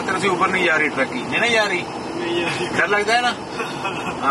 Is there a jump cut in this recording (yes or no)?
no